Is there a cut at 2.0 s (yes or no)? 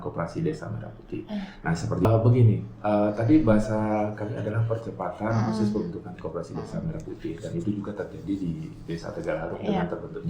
yes